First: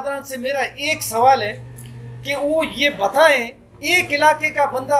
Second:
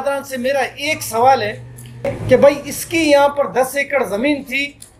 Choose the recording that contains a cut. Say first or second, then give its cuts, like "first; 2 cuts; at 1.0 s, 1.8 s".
second; 1 cut; at 2.1 s